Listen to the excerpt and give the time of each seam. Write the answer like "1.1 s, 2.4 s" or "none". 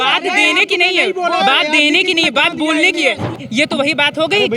3.4 s